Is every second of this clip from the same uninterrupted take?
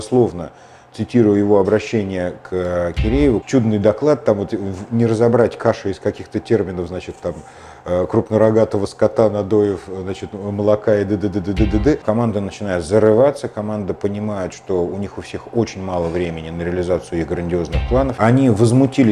no; 3 cuts; at 3.4 s, 12.0 s, 18.1 s

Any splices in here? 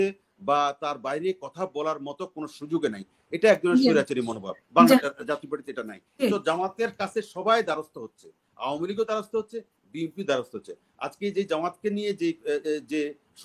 yes; 1 cut; at 6.2 s

